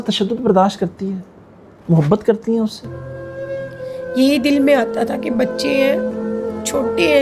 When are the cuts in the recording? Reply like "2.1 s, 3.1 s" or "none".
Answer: none